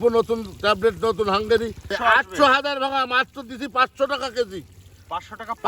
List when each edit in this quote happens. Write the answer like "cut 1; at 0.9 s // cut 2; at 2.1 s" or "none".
cut 1; at 1.9 s